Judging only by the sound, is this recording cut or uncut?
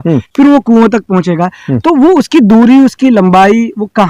uncut